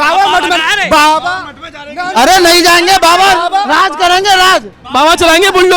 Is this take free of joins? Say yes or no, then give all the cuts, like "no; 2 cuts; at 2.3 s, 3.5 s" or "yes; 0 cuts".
yes; 0 cuts